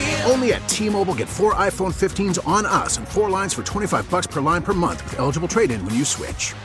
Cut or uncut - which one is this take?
uncut